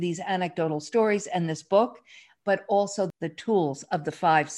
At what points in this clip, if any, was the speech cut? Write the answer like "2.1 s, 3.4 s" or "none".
3.1 s